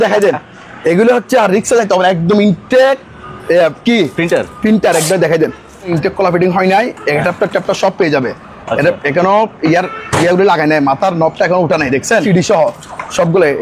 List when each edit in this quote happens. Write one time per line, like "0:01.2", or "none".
0:05.9
0:12.2